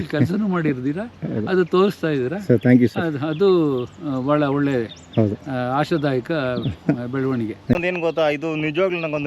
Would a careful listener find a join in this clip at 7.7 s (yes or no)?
yes